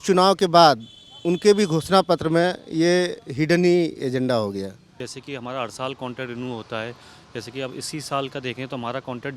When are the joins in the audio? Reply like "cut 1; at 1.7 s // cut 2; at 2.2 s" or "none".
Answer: cut 1; at 4.8 s

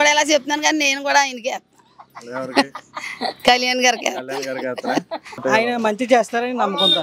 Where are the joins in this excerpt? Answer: cut 1; at 5.4 s

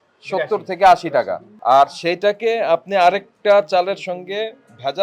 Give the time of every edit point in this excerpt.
cut 1; at 1.4 s

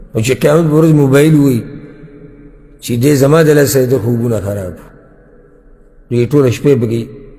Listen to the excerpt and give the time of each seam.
none

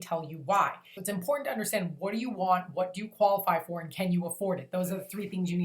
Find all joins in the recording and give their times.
cut 1; at 0.9 s

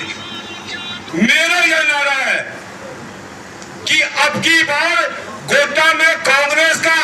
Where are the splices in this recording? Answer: cut 1; at 1.0 s

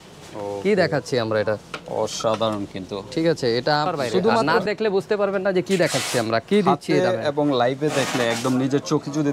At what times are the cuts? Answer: cut 1; at 4.5 s

